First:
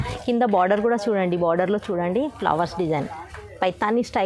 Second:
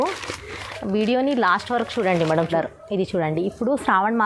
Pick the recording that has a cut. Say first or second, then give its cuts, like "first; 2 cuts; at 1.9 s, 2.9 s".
second; 1 cut; at 2.5 s